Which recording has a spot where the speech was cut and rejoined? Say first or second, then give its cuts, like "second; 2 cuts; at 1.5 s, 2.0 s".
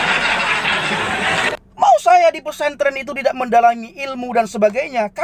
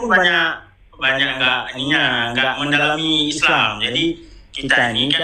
first; 1 cut; at 0.9 s